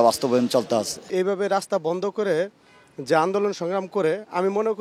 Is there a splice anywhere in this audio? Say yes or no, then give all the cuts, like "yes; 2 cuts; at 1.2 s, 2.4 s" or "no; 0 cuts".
yes; 1 cut; at 1.0 s